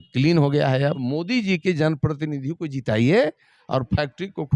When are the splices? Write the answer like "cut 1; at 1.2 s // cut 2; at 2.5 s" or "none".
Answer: cut 1; at 1.0 s